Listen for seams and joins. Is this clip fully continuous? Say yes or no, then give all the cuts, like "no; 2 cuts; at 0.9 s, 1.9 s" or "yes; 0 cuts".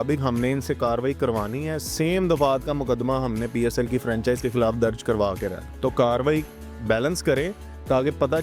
no; 1 cut; at 5.7 s